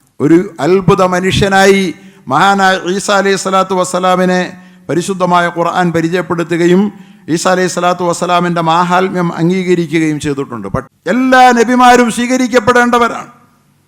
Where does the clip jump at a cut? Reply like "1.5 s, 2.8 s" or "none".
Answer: 10.9 s